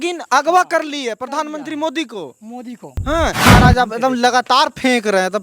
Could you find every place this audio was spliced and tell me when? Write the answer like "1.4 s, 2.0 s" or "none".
3.4 s

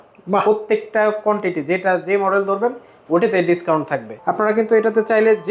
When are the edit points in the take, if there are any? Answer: 4.0 s

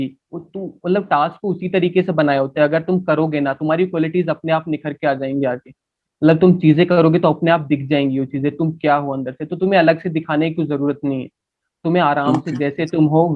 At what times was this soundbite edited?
none

